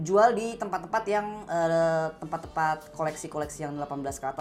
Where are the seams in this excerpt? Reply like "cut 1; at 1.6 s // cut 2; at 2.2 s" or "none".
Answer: none